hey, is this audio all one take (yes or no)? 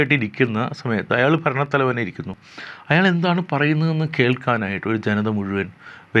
yes